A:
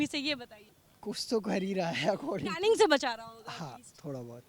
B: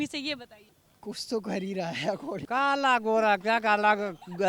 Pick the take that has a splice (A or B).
B